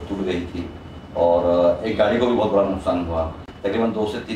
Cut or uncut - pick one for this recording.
uncut